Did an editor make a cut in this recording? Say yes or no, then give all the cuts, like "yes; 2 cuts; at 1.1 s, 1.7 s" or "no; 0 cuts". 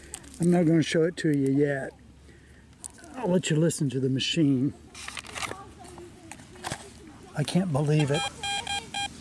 yes; 1 cut; at 8.2 s